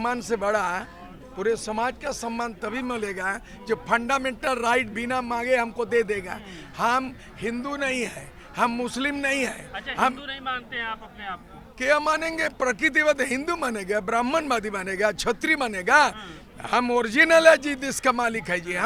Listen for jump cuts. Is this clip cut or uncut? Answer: uncut